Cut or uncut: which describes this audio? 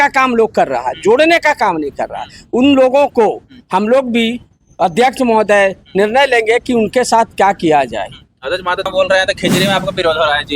cut